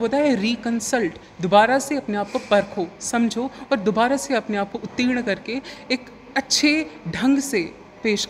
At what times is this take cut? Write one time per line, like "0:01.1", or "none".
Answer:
none